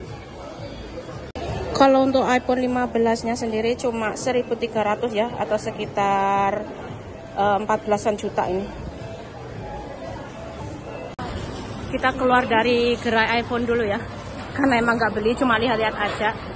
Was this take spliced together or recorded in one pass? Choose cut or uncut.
uncut